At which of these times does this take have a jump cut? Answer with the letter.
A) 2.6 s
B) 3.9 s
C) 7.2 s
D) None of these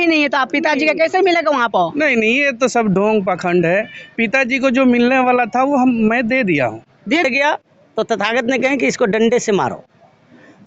C